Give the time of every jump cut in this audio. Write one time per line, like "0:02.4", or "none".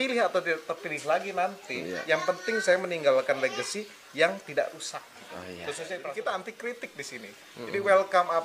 0:06.0